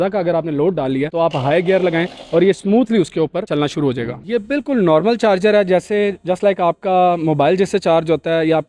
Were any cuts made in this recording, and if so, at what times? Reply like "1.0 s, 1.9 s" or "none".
4.2 s